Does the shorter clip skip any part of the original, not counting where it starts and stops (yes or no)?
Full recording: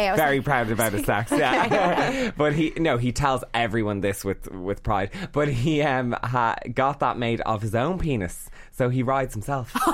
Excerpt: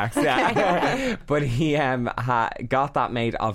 yes